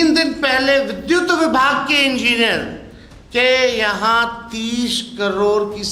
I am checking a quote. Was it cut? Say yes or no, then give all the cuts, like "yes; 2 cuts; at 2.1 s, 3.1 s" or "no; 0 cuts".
no; 0 cuts